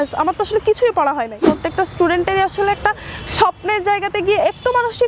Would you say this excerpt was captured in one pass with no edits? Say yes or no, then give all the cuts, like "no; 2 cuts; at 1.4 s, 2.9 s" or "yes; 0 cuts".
no; 1 cut; at 1.6 s